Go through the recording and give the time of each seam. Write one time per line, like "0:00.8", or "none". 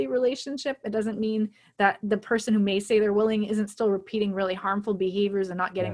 none